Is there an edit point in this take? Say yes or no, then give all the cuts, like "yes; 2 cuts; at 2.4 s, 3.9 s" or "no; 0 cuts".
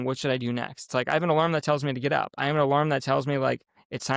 no; 0 cuts